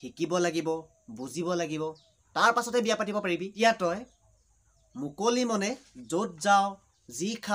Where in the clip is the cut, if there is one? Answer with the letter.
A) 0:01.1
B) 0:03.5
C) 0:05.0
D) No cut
B